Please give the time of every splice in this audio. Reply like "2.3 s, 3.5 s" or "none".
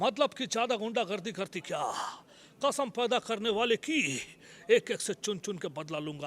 none